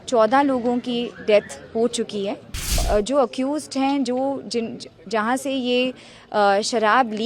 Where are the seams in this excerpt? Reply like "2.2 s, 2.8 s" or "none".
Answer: 2.8 s